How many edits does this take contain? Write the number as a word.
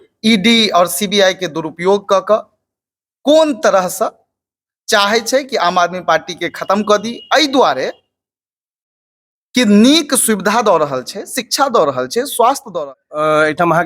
one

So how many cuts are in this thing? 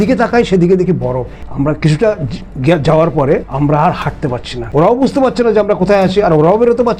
three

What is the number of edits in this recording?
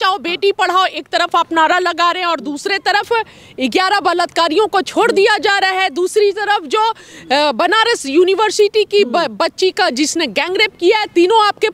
zero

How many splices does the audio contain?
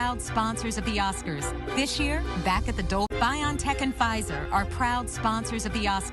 one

